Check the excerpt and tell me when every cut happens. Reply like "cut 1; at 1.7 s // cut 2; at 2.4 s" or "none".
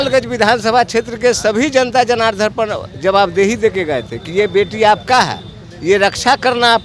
none